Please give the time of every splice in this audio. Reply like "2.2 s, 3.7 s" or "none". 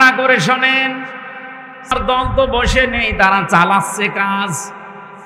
1.9 s